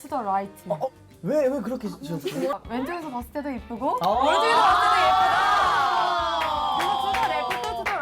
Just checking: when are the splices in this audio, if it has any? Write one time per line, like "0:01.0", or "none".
0:01.0
0:02.5